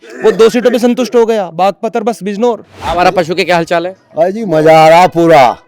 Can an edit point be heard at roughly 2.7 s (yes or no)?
yes